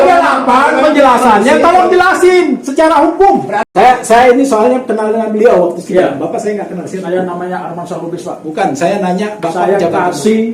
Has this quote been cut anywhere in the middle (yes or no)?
yes